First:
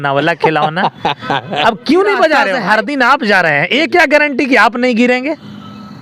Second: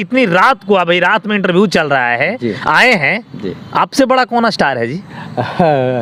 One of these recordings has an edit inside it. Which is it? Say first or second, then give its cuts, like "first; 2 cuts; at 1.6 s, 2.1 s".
first; 1 cut; at 2.5 s